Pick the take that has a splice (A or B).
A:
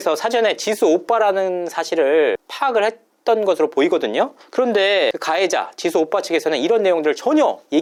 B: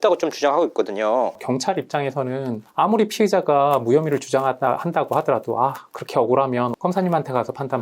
B